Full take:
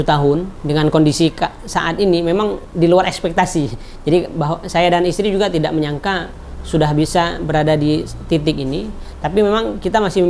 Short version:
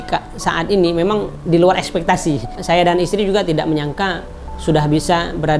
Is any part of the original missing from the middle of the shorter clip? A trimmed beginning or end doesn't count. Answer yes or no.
yes